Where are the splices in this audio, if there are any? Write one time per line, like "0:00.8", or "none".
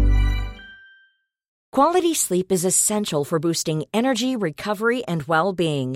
0:01.5